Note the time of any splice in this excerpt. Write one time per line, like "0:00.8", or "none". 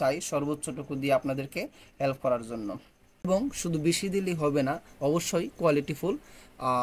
0:03.3